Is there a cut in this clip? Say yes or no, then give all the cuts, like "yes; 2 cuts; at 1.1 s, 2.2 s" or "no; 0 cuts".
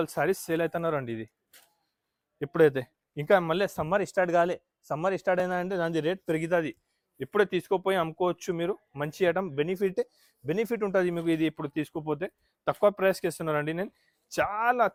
no; 0 cuts